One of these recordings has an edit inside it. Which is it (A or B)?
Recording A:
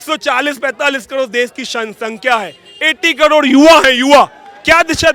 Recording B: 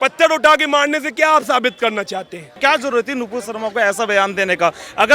B